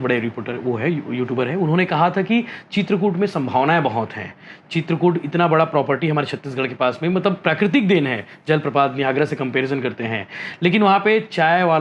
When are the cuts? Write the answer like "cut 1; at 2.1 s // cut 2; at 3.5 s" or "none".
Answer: none